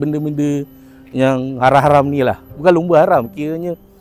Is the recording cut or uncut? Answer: cut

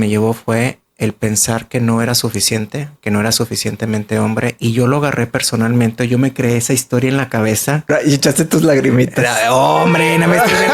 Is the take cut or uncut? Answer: cut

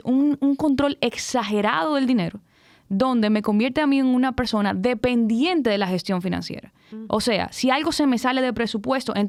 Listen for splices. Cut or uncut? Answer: uncut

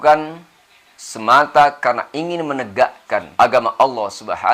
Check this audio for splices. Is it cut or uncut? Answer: cut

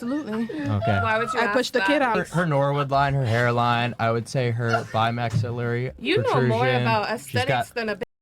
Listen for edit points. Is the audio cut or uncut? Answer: cut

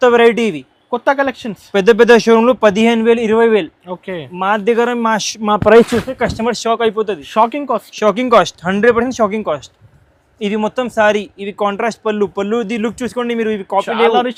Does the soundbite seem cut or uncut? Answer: uncut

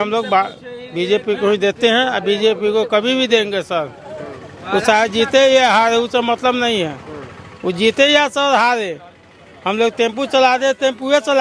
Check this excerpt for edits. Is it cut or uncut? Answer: uncut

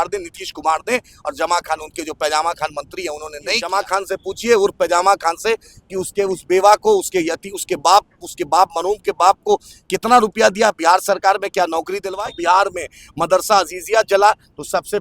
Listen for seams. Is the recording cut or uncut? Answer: cut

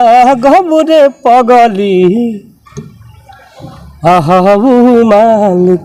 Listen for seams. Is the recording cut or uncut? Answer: uncut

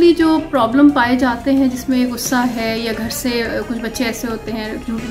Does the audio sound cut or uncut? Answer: uncut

